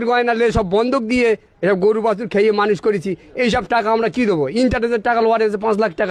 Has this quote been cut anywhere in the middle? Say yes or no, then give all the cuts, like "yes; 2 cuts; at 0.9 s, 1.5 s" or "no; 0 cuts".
no; 0 cuts